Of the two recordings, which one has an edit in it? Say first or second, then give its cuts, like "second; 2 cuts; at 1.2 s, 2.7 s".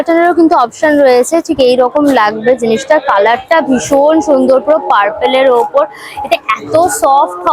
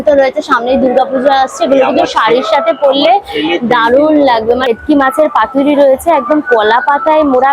second; 1 cut; at 4.7 s